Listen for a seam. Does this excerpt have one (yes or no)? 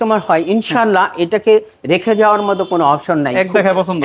no